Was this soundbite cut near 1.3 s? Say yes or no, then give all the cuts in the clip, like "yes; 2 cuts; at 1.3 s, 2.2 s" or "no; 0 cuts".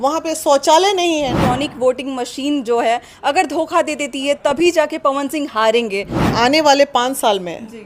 yes; 2 cuts; at 1.3 s, 6.3 s